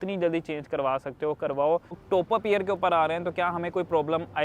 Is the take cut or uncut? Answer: cut